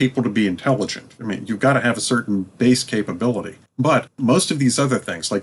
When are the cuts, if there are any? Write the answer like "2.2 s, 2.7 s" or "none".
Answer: 4.1 s